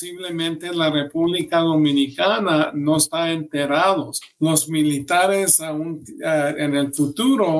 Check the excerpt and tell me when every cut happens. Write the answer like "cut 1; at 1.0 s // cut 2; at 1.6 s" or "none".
cut 1; at 4.2 s